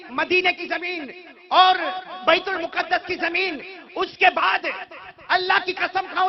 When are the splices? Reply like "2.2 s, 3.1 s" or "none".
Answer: none